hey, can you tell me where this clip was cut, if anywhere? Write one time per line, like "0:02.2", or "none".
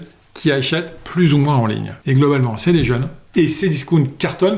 0:01.9
0:03.1